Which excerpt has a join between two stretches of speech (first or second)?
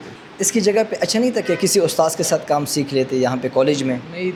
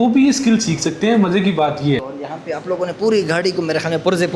second